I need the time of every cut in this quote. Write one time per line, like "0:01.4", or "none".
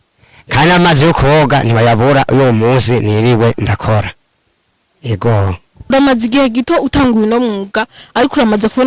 0:05.9